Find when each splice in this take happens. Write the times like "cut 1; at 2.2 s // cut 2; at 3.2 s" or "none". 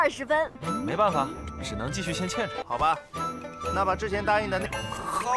none